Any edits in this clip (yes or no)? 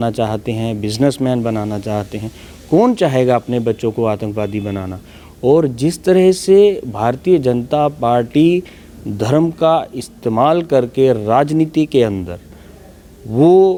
no